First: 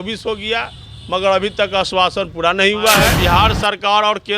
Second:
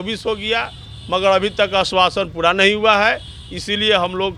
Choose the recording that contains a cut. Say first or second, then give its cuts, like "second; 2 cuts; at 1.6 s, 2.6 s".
first; 1 cut; at 3.1 s